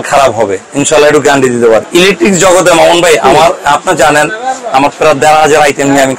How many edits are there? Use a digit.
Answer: 1